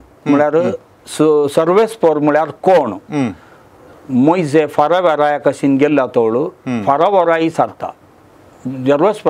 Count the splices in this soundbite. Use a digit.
0